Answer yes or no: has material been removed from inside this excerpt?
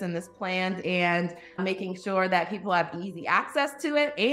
yes